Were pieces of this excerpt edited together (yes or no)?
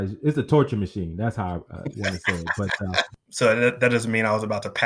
yes